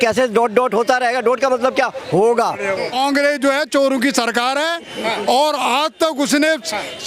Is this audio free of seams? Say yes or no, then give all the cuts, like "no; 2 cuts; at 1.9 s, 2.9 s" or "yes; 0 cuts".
no; 1 cut; at 2.9 s